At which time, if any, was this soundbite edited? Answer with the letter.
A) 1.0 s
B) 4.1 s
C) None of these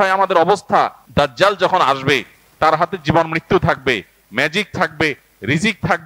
A